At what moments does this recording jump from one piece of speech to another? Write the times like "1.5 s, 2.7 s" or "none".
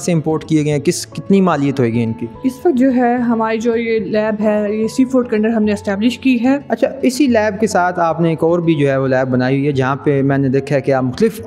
2.4 s, 6.6 s